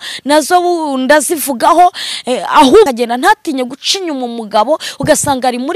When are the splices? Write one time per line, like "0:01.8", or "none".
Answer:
0:02.9